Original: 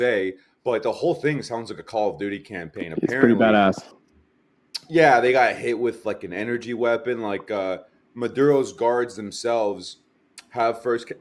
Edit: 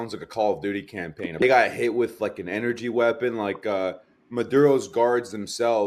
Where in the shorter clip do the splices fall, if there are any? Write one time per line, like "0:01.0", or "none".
0:01.4